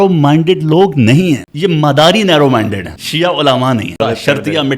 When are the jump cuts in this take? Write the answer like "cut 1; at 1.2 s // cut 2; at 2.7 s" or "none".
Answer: cut 1; at 1.5 s // cut 2; at 3.0 s // cut 3; at 4.0 s